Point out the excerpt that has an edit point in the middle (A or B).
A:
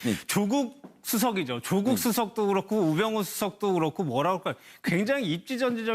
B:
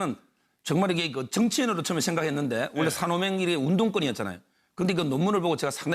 B